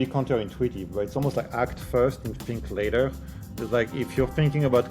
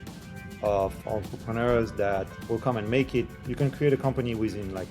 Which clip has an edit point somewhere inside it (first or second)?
second